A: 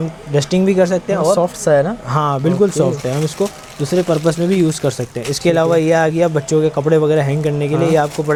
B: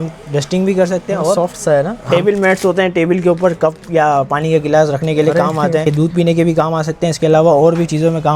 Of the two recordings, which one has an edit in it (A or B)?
B